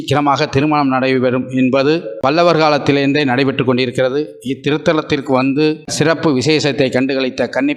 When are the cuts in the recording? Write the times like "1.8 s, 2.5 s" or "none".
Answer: 2.1 s, 5.9 s